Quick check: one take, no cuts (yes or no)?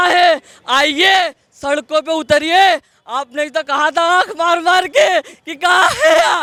yes